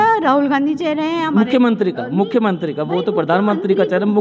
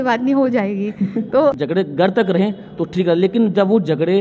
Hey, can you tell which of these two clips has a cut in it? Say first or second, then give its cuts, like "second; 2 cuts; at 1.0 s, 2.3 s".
second; 1 cut; at 1.6 s